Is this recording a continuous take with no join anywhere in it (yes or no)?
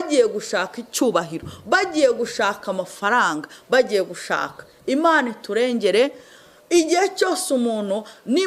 yes